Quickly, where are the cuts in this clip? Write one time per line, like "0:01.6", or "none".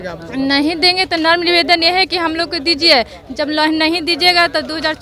none